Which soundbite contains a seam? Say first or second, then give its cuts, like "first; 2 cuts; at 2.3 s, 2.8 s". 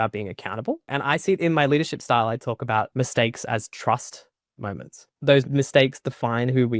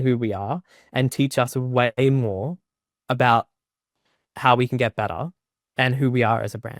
first; 3 cuts; at 1.0 s, 2.9 s, 5.3 s